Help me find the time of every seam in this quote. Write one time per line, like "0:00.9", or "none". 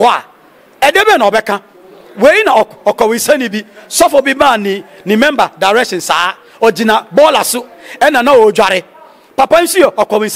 none

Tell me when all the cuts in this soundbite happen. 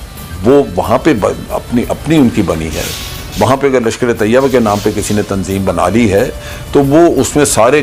none

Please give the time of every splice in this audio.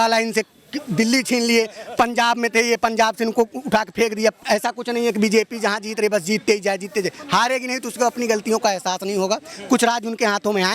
0:04.4

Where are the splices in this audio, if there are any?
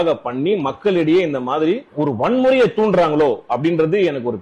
0:01.9

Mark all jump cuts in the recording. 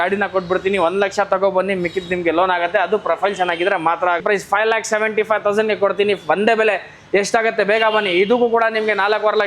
0:04.2

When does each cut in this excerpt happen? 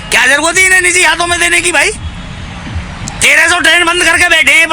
none

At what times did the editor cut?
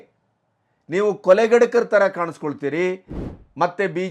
0:03.1

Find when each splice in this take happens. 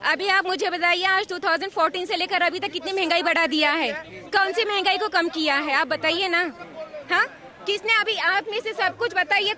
none

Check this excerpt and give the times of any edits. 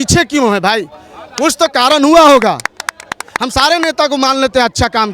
none

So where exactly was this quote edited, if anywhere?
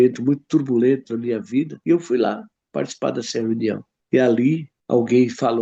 0:01.8
0:03.9
0:04.7

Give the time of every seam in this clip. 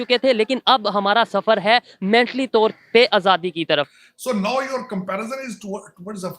0:04.0

